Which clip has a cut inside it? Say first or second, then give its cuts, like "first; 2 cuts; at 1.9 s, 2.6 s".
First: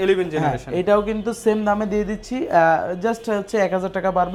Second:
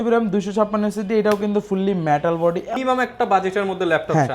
second; 1 cut; at 2.8 s